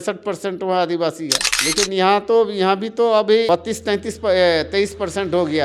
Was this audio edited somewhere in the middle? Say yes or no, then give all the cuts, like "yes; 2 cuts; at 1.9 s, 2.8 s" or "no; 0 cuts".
no; 0 cuts